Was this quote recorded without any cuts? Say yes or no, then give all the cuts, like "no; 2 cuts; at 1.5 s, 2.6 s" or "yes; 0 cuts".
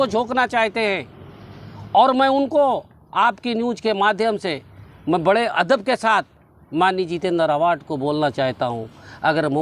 yes; 0 cuts